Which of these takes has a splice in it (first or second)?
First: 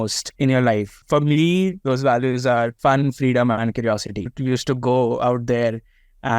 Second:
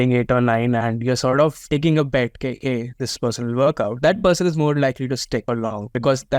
first